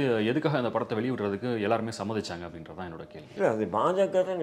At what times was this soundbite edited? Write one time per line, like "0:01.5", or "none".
0:03.2